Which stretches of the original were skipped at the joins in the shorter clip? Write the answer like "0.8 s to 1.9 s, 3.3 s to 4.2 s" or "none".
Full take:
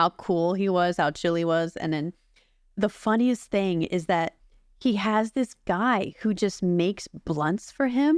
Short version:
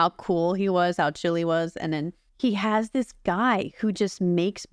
2.2 s to 4.6 s